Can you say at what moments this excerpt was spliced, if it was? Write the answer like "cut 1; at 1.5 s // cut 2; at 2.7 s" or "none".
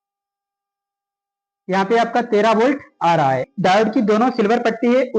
cut 1; at 3.5 s

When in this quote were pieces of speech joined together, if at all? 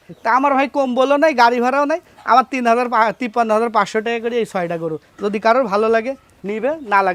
none

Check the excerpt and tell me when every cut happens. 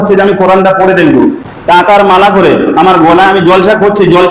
cut 1; at 1.5 s

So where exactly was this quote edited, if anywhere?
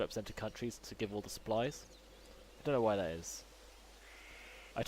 cut 1; at 3.0 s

